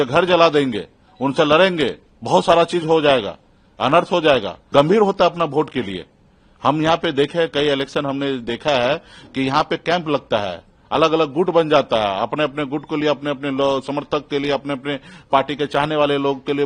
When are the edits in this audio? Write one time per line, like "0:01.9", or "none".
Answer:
0:02.1
0:04.6